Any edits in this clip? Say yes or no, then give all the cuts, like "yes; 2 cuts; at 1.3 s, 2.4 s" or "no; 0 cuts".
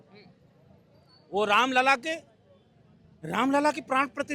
no; 0 cuts